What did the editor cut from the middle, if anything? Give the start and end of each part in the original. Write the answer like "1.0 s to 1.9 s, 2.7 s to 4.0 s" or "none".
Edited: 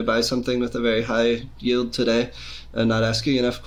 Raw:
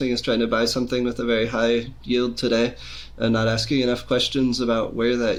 none